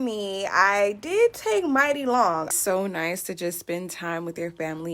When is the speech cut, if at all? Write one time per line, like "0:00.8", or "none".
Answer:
0:02.5